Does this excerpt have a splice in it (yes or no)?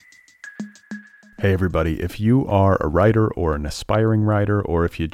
yes